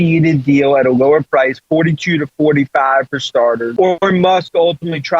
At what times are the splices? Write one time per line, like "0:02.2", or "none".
0:03.7